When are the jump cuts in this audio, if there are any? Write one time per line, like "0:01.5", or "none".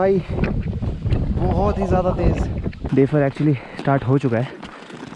0:02.7